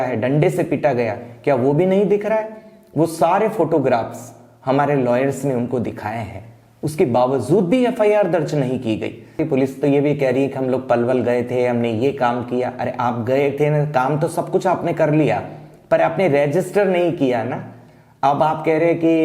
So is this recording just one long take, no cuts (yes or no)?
no